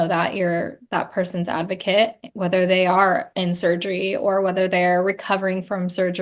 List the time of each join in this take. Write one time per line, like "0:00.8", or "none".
none

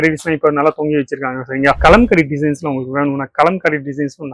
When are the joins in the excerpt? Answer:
0:01.8

